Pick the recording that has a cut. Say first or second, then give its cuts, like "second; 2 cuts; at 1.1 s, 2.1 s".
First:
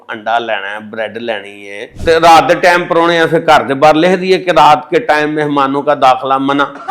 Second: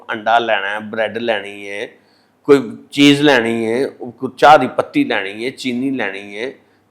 first; 1 cut; at 1.9 s